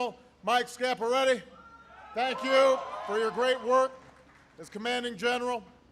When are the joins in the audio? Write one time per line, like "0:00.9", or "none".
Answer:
0:03.7